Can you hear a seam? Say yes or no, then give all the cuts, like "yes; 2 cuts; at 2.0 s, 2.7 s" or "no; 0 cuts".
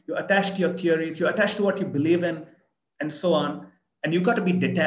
no; 0 cuts